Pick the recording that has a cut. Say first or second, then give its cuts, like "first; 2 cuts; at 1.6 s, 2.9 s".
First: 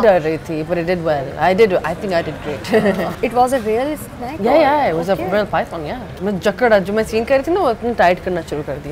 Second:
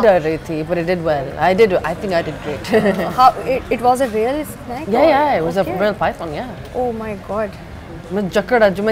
first; 2 cuts; at 3.1 s, 6.0 s